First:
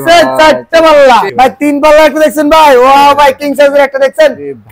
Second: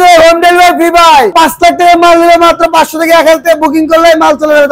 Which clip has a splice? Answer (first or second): first